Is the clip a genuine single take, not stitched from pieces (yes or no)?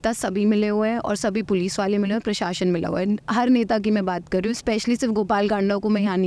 yes